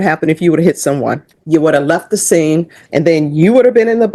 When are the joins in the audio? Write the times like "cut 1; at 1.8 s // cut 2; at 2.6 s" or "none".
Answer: cut 1; at 1.3 s // cut 2; at 2.8 s